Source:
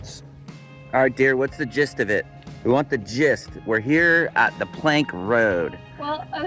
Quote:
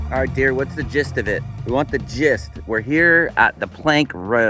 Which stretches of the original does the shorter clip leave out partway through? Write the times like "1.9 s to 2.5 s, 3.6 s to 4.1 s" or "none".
2.4 s to 2.5 s